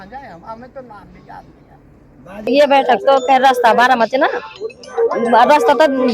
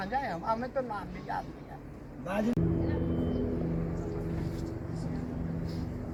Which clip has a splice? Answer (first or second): first